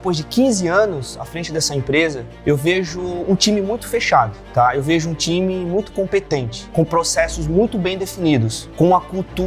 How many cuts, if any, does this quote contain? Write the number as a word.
four